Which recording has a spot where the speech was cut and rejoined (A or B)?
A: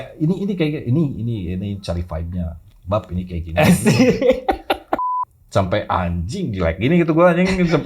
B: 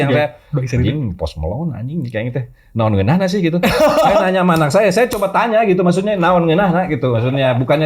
A